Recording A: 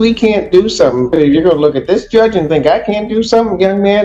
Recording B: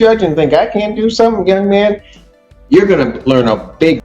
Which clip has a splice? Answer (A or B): A